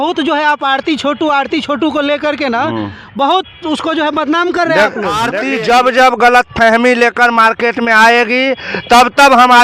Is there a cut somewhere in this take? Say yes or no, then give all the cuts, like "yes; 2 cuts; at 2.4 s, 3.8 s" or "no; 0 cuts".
yes; 1 cut; at 5.4 s